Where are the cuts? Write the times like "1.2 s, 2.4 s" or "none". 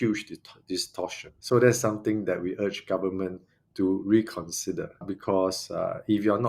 1.3 s, 5.1 s